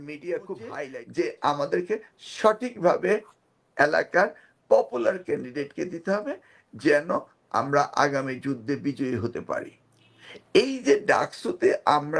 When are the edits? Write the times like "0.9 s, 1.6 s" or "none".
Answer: 0.9 s